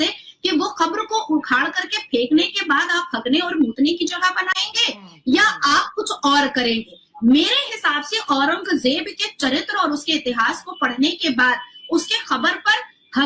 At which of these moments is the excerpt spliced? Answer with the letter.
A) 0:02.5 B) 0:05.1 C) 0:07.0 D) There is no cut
D